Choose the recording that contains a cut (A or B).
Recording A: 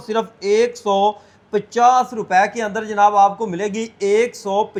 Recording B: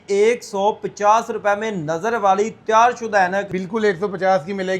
B